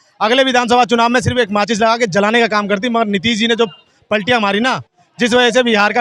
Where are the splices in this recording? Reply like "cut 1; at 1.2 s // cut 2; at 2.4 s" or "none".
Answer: none